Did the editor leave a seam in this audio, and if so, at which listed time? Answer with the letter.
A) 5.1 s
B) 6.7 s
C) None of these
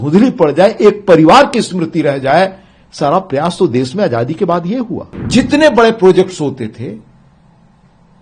A